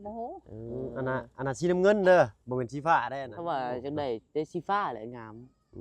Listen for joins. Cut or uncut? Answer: cut